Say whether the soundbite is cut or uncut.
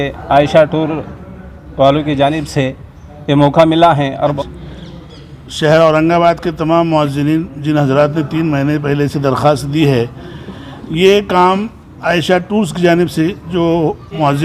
cut